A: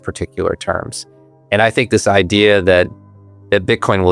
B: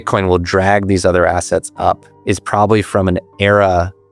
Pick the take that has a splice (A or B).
B